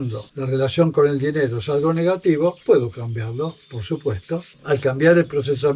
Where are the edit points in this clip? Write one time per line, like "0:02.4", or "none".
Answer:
none